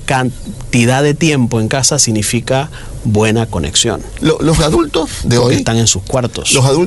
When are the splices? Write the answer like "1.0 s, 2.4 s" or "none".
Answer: 4.1 s